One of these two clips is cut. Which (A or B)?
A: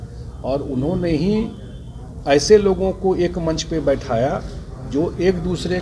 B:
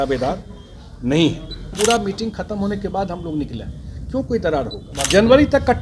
B